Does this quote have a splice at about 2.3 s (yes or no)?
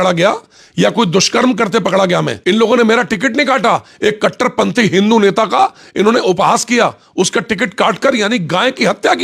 yes